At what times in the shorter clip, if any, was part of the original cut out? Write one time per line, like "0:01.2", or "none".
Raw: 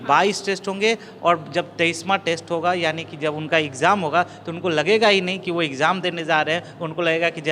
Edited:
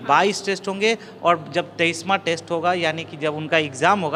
none